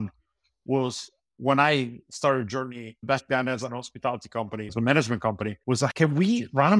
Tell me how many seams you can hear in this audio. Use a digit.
3